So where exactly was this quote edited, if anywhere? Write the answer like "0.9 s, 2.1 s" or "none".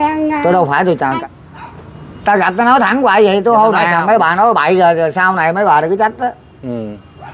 1.2 s

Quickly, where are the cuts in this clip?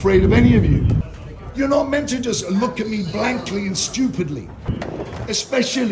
1.1 s, 4.8 s

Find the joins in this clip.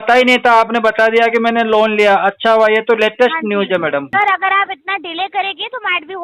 4.1 s

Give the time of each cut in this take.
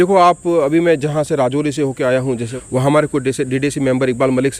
2.5 s

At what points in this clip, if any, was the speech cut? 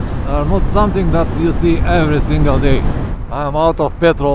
3.1 s

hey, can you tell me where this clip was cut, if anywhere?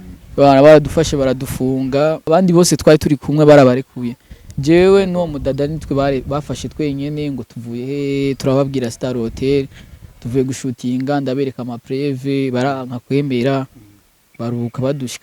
2.2 s

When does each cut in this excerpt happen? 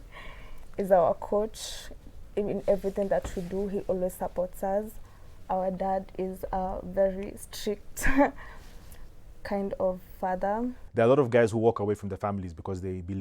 10.8 s

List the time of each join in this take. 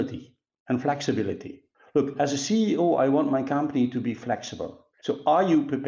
4.9 s

